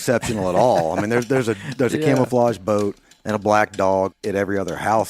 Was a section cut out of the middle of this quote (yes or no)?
yes